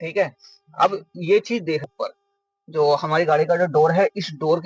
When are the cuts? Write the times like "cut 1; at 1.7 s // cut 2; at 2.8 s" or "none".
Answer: cut 1; at 1.9 s